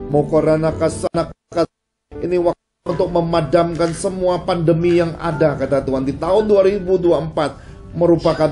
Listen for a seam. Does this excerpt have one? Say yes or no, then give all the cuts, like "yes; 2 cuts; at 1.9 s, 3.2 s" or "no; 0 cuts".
yes; 1 cut; at 1.0 s